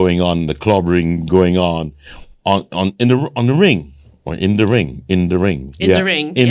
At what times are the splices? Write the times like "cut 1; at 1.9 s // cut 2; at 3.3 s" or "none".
none